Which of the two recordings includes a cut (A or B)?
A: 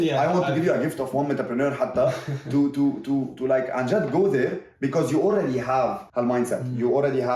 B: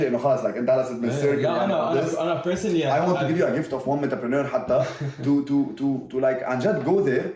A